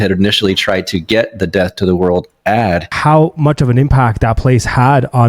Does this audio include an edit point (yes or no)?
yes